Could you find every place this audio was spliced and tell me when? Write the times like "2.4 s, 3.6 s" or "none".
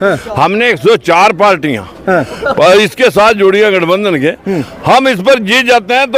none